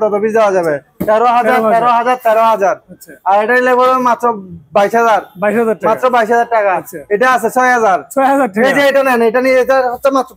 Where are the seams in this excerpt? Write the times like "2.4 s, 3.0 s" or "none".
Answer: none

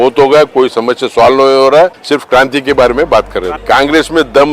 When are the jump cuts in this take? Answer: 2.0 s, 3.5 s

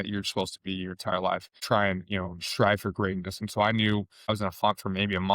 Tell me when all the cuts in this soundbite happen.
1.6 s

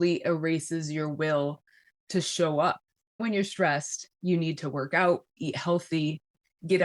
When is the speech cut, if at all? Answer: 3.2 s

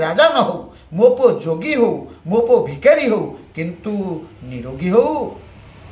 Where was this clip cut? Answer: none

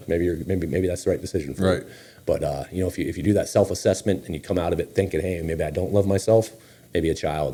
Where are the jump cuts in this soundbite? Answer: none

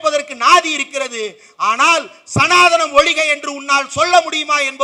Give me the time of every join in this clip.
none

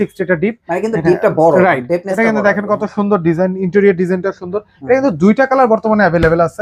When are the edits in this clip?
none

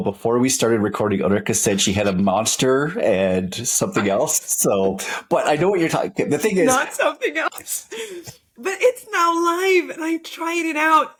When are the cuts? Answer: none

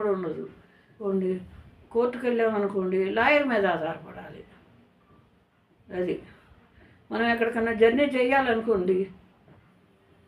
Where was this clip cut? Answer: 1.0 s

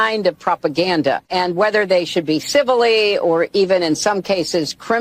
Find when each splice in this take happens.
1.2 s

